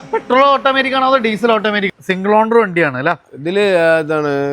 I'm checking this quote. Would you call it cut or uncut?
cut